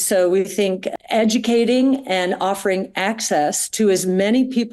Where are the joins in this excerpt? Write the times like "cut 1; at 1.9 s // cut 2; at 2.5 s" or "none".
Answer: none